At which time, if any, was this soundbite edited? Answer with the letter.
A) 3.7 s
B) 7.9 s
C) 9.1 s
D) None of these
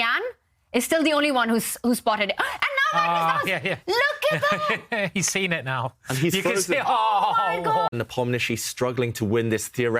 B